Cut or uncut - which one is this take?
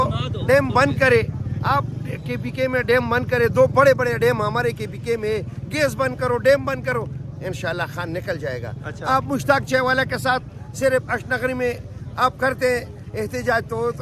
uncut